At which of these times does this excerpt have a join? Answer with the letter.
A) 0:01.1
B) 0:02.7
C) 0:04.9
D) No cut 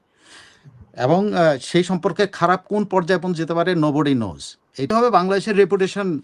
C